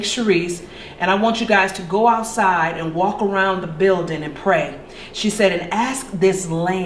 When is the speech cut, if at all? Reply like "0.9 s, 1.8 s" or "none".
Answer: none